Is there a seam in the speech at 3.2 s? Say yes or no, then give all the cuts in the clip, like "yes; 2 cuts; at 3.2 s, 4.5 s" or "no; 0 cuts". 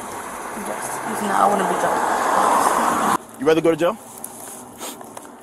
yes; 1 cut; at 3.2 s